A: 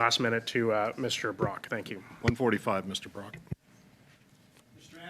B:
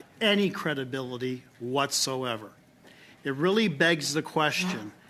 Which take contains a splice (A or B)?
A